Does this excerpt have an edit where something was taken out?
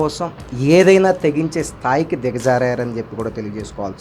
no; 0 cuts

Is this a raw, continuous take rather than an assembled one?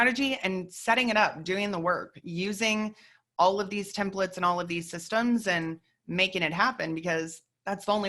yes; 0 cuts

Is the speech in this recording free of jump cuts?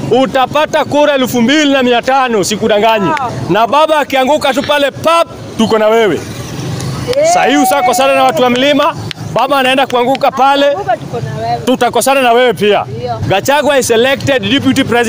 no; 2 cuts; at 3.3 s, 13.1 s

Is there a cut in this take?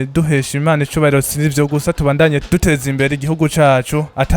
yes; 1 cut; at 2.4 s

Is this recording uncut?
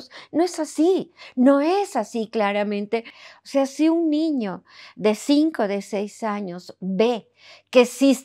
no; 1 cut; at 3.2 s

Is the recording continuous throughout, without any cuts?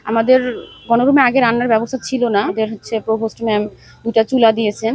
no; 1 cut; at 2.5 s

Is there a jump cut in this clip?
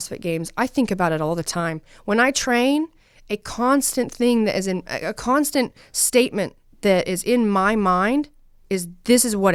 no; 0 cuts

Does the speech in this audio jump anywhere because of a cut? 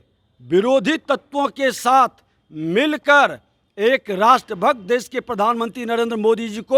no; 0 cuts

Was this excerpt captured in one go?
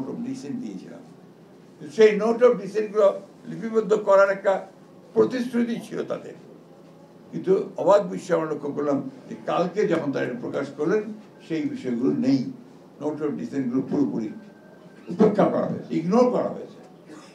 yes; 0 cuts

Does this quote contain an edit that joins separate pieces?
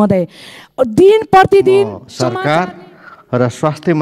yes; 1 cut; at 2.1 s

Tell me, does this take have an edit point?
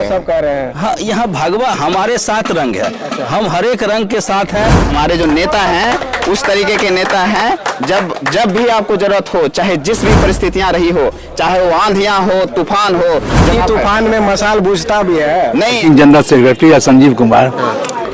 yes; 3 cuts; at 4.8 s, 13.5 s, 15.8 s

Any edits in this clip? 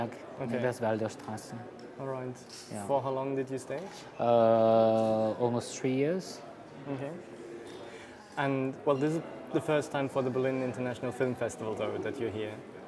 yes; 1 cut; at 10.2 s

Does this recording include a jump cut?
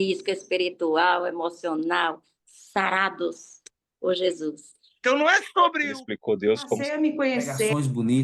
yes; 1 cut; at 4.9 s

